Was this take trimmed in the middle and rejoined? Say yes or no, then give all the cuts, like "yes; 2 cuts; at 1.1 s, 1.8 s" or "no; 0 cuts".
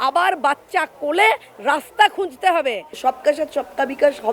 yes; 1 cut; at 2.9 s